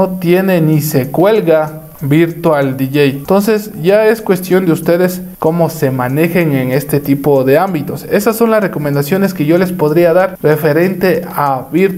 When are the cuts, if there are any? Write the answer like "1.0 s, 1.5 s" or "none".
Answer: none

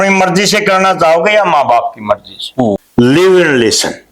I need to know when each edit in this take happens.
2.8 s

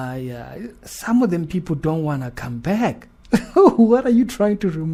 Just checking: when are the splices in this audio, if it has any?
none

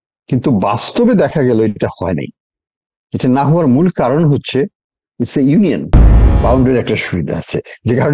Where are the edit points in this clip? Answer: 6.2 s

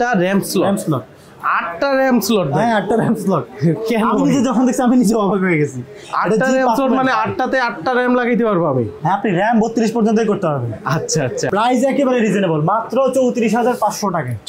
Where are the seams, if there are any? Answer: 11.5 s

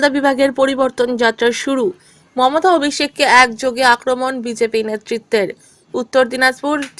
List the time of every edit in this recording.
none

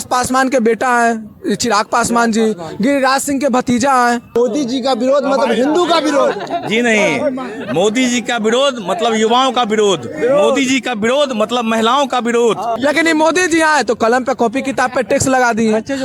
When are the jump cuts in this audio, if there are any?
4.4 s, 12.8 s

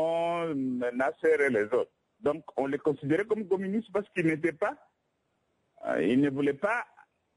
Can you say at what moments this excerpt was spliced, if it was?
none

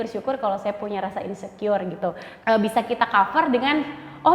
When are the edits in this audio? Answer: 2.3 s

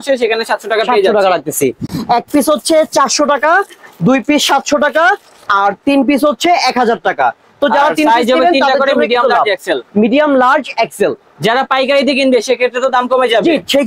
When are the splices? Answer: none

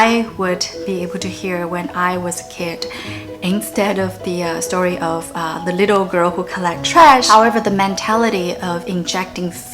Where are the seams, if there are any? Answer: 7.2 s

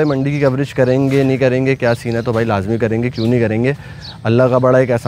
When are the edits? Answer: none

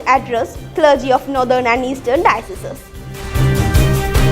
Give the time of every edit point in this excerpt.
3.2 s

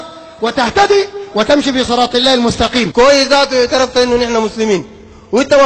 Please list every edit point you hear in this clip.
2.9 s

